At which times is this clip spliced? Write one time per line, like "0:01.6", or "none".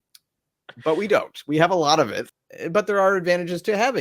0:02.2